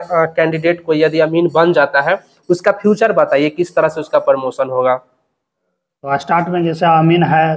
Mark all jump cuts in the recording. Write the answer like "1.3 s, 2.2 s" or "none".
none